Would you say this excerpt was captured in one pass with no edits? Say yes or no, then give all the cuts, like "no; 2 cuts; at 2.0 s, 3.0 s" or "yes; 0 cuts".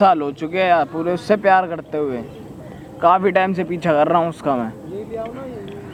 yes; 0 cuts